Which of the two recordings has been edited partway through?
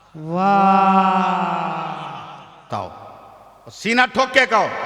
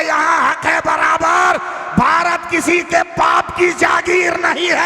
first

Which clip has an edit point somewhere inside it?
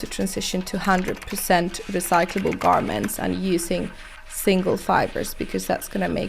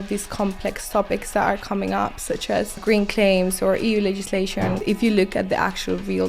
second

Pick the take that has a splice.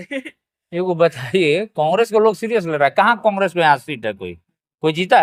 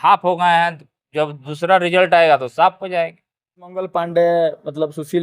second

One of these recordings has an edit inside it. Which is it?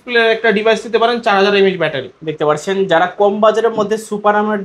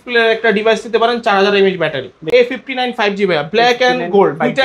second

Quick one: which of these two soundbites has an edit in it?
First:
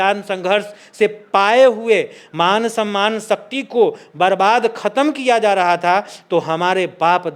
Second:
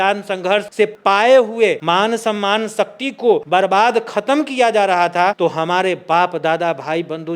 second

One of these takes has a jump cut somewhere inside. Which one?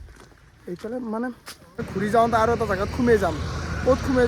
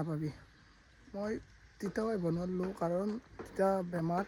first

